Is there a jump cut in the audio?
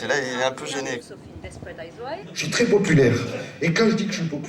yes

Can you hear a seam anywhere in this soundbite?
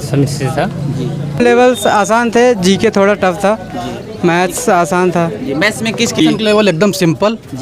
yes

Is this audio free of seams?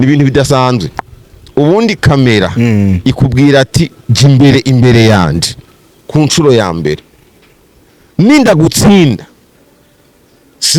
yes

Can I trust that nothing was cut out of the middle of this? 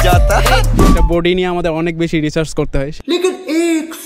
no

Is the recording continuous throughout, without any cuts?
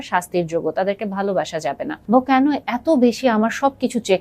no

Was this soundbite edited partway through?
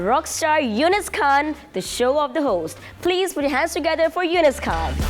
no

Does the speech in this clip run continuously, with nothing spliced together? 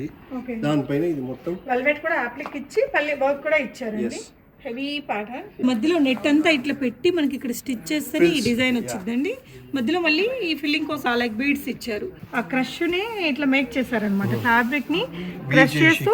no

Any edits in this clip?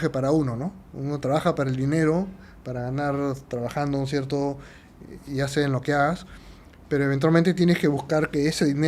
no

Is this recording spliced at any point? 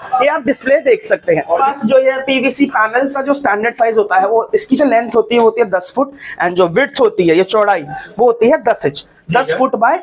yes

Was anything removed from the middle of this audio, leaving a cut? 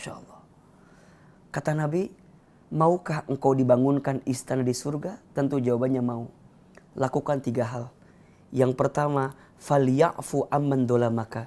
no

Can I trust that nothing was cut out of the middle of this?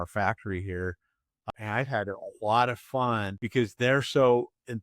no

